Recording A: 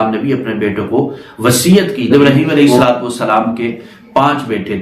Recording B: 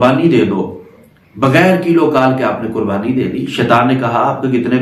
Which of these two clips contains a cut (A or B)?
A